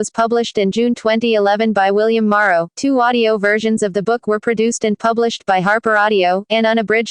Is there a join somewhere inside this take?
yes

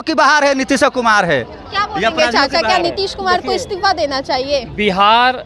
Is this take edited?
no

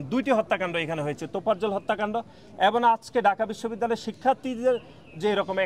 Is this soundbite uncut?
yes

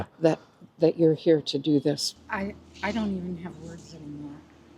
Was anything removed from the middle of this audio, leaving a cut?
yes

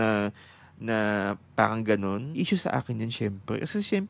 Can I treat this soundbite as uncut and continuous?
no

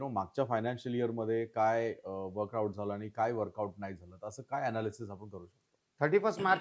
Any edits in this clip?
no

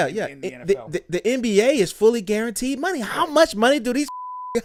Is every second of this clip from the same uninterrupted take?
yes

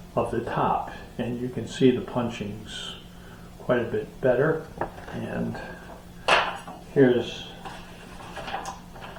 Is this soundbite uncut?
yes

